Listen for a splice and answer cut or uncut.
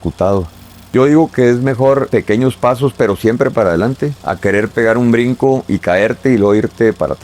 cut